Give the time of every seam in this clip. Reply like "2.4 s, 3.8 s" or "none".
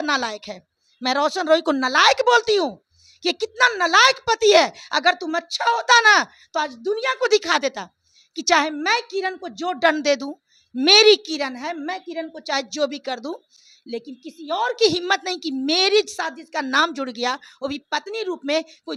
none